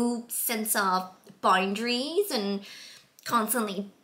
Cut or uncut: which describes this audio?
uncut